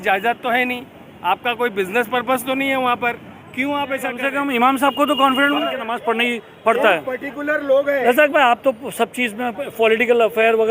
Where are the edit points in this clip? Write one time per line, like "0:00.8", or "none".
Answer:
0:04.2
0:05.9